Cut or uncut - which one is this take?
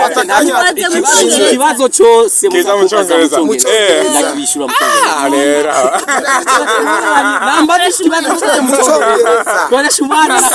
uncut